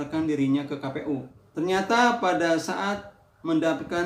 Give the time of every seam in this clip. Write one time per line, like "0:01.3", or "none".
0:01.4